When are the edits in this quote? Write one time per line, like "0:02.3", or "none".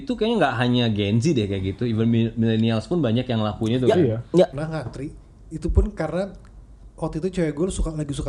0:04.6